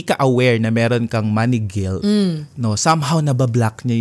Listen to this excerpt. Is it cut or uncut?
uncut